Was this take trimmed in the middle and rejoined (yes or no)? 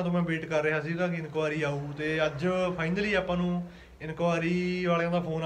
no